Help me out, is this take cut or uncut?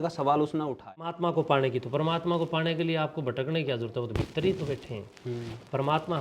cut